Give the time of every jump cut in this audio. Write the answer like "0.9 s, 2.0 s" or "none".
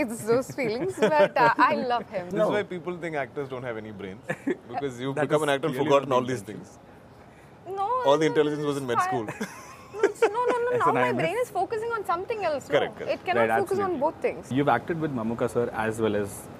2.3 s, 14.5 s